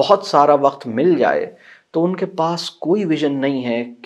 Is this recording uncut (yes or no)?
yes